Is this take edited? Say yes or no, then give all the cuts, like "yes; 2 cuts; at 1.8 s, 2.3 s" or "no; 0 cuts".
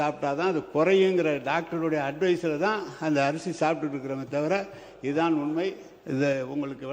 no; 0 cuts